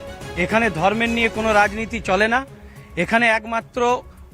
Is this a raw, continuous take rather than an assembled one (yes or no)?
yes